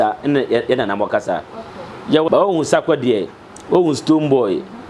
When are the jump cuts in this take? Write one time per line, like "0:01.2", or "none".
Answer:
0:02.3